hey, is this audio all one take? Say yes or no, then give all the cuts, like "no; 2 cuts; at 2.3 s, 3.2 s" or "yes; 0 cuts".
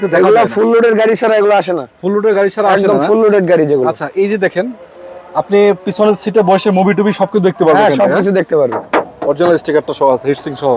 no; 1 cut; at 8.8 s